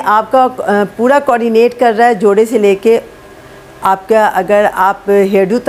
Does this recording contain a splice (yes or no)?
no